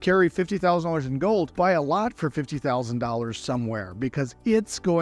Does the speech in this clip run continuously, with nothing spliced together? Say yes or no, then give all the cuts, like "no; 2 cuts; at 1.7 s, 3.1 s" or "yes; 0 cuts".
no; 1 cut; at 1.5 s